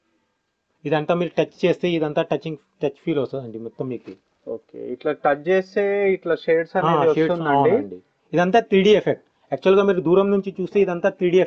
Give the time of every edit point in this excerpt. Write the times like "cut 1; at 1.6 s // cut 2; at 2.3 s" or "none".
none

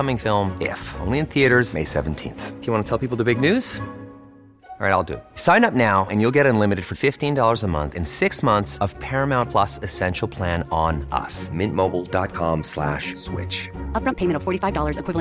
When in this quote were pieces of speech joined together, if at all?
none

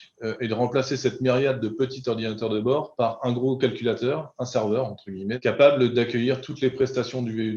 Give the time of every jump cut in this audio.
cut 1; at 5.4 s

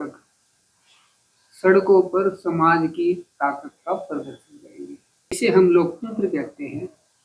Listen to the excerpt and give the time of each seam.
cut 1; at 5.4 s

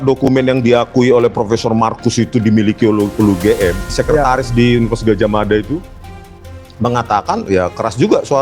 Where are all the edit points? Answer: cut 1; at 4.0 s

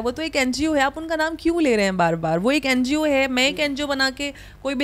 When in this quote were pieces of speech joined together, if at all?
none

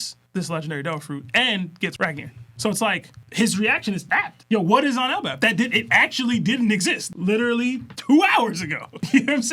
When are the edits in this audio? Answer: none

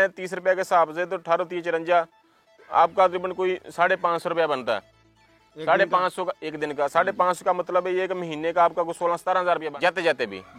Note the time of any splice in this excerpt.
cut 1; at 9.7 s

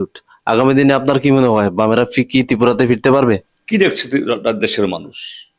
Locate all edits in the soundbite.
cut 1; at 3.5 s

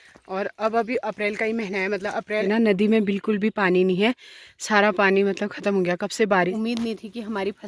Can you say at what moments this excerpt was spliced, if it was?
cut 1; at 2.4 s // cut 2; at 6.5 s

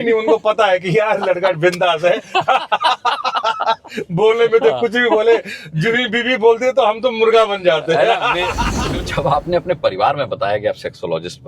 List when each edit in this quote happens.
cut 1; at 8.7 s

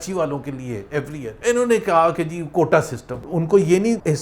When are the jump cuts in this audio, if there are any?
cut 1; at 3.2 s

